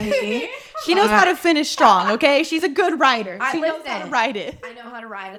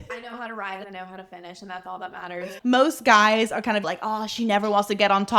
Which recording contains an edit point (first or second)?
second